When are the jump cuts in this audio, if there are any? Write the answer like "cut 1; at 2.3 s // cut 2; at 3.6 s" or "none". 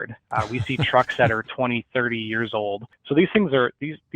cut 1; at 2.9 s

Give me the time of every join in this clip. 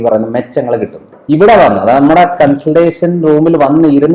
cut 1; at 1.1 s

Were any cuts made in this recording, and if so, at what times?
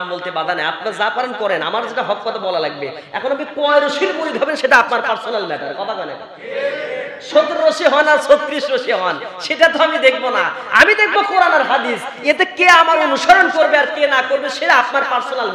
none

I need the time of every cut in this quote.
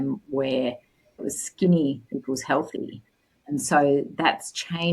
cut 1; at 1.2 s

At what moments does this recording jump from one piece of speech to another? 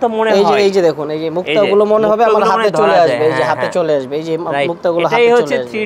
none

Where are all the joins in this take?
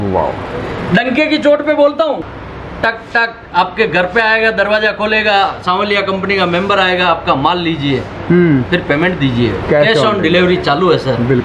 cut 1; at 2.3 s

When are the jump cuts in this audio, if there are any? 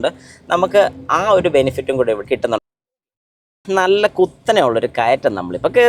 none

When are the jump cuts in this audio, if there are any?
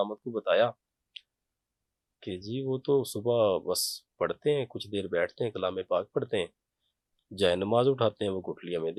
none

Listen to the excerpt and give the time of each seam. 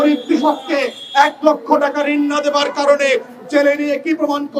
none

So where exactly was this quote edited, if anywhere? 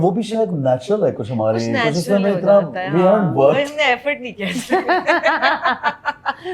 none

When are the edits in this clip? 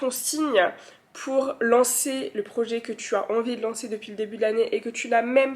none

